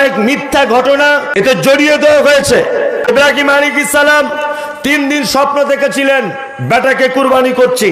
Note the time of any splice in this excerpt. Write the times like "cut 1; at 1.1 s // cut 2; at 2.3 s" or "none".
cut 1; at 1.3 s // cut 2; at 3.1 s